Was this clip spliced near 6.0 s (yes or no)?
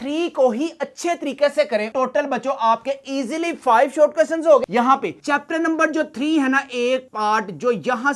no